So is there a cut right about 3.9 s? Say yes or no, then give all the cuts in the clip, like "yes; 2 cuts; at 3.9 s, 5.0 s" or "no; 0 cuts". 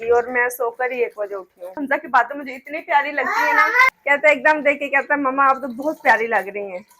yes; 2 cuts; at 1.8 s, 3.9 s